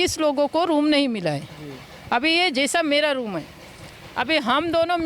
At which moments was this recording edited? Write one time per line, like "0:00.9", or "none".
none